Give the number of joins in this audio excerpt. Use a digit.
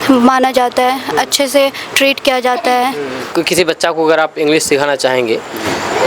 1